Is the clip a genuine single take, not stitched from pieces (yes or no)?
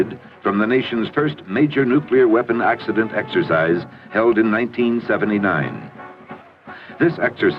no